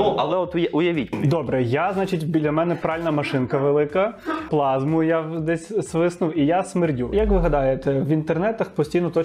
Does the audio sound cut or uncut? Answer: cut